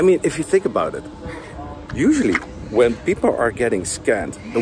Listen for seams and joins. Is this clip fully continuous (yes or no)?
yes